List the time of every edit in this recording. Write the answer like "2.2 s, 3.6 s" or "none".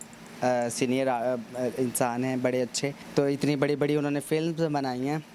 3.0 s